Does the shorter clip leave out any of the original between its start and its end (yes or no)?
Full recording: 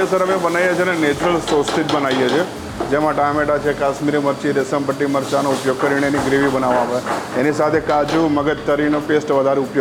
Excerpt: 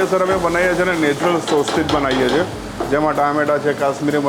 no